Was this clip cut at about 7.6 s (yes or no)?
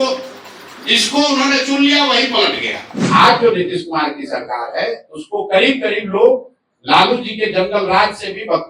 no